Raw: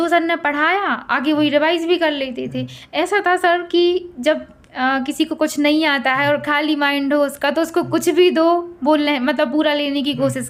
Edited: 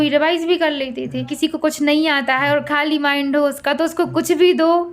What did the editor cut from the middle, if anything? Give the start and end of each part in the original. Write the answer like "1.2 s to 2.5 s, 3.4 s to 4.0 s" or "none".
2.7 s to 5.1 s